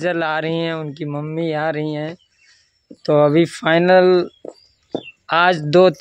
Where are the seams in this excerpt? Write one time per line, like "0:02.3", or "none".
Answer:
none